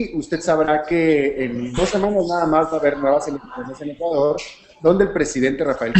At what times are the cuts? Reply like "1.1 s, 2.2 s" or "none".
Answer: 4.1 s